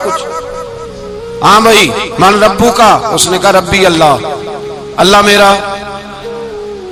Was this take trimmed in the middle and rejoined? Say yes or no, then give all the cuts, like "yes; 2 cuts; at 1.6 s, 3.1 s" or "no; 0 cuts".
no; 0 cuts